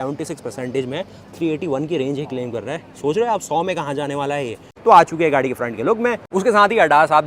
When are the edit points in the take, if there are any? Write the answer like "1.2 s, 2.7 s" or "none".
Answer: 4.7 s, 6.2 s